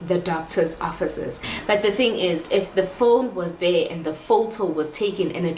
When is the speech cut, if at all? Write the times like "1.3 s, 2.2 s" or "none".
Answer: 1.5 s